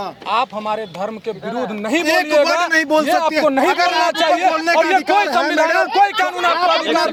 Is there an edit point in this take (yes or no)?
no